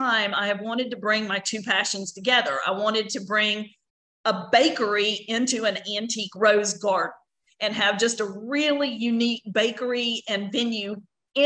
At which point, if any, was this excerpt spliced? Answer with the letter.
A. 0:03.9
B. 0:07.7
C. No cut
C